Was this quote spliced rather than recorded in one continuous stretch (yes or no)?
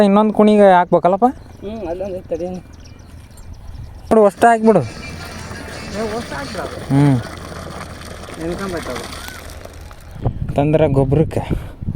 yes